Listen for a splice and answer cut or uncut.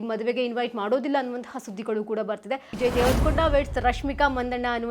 cut